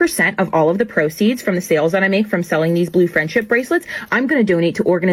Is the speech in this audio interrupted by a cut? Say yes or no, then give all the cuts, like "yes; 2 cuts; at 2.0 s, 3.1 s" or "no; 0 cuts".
no; 0 cuts